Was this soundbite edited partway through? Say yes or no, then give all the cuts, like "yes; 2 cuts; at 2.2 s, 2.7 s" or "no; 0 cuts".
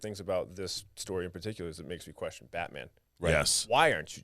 no; 0 cuts